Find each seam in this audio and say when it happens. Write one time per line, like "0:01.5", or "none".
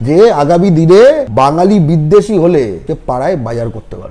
0:01.3
0:02.8